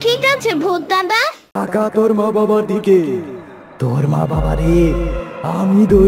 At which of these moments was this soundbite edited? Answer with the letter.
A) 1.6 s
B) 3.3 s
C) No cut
A